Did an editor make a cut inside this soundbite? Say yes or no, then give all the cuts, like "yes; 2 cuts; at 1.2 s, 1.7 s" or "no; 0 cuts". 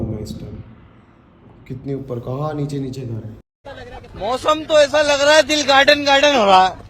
yes; 1 cut; at 3.9 s